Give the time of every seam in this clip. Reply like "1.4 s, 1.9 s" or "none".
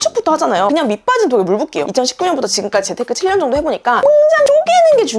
1.9 s

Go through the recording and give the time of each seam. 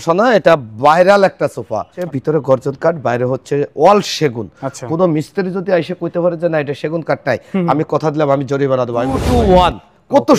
2.0 s, 9.2 s

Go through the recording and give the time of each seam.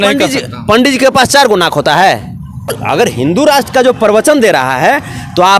2.8 s

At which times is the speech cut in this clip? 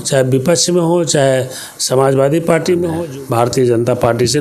3.0 s

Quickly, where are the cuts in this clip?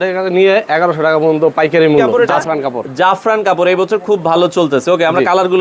2.2 s

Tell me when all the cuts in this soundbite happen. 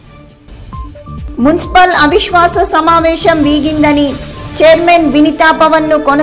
1.1 s

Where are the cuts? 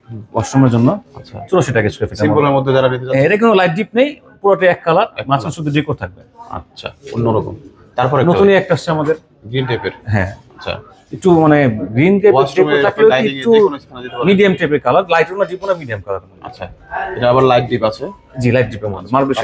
none

